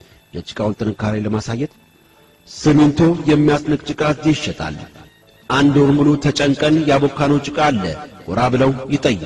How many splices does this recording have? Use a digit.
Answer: 0